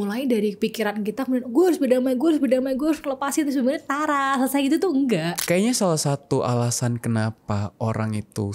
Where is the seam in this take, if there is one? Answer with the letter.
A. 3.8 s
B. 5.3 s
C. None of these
B